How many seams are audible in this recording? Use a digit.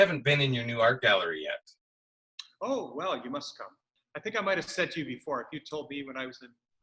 1